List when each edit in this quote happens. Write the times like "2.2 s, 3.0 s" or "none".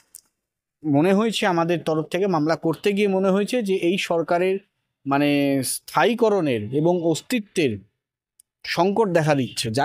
none